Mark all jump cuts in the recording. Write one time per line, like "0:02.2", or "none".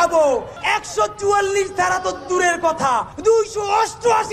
none